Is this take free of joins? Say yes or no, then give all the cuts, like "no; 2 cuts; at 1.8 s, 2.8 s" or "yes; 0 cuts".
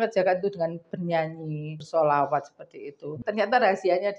no; 2 cuts; at 1.7 s, 3.2 s